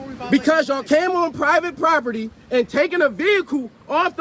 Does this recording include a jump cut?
no; 0 cuts

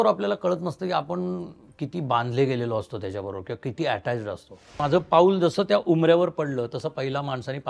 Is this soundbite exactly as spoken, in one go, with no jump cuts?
no; 1 cut; at 4.8 s

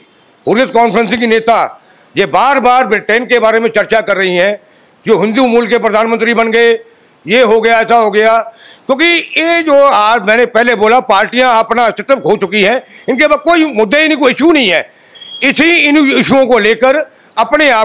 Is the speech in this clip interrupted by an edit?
no; 0 cuts

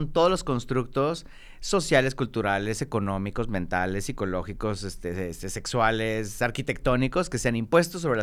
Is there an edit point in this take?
no; 0 cuts

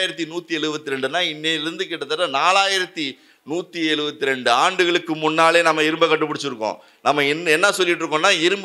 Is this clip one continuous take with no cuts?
yes; 0 cuts

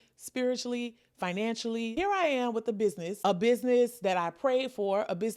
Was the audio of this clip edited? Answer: yes; 2 cuts; at 1.9 s, 3.1 s

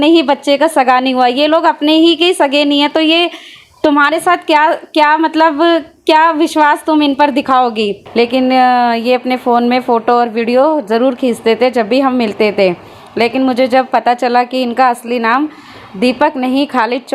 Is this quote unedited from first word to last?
no; 1 cut; at 8.0 s

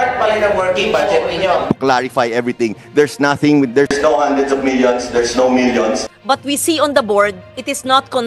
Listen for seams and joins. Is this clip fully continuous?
no; 2 cuts; at 1.6 s, 6.1 s

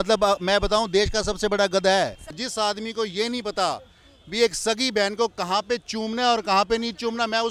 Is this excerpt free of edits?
no; 1 cut; at 2.4 s

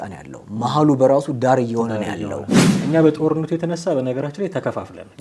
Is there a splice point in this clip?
yes; 1 cut; at 2.6 s

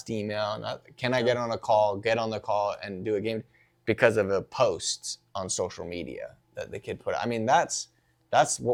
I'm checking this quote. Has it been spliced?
no; 0 cuts

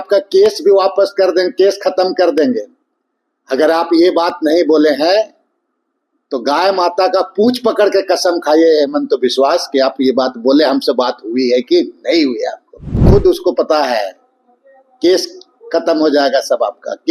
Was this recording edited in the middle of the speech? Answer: yes; 1 cut; at 12.9 s

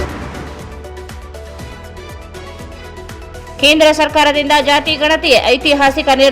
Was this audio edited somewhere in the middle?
yes; 1 cut; at 2.7 s

